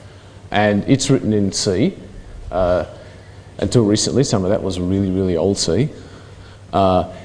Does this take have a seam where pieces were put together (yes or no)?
yes